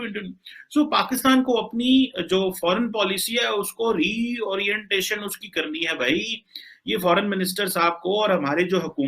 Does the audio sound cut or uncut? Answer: uncut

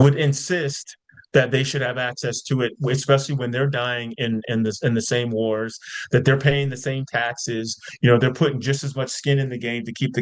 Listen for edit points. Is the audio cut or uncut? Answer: uncut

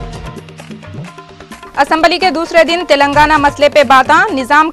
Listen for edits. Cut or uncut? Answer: uncut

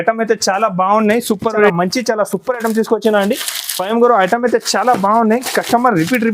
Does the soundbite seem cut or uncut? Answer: cut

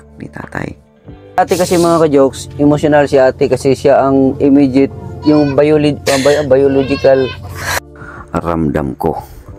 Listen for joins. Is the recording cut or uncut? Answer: cut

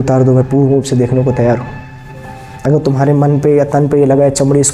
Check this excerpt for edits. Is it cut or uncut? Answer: uncut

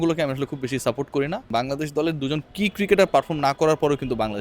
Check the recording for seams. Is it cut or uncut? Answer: cut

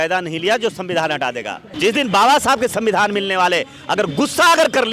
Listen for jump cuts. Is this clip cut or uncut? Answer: cut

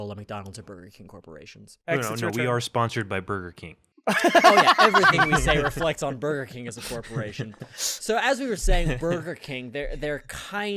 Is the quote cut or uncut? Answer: uncut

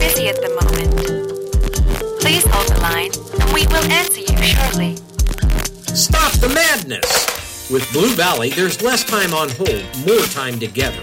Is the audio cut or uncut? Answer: uncut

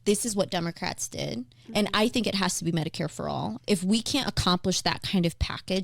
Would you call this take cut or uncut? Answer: cut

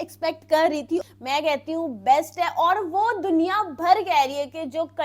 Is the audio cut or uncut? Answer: cut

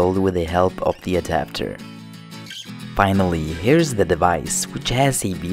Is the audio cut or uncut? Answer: uncut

